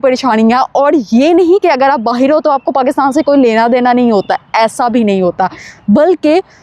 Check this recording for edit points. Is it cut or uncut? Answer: uncut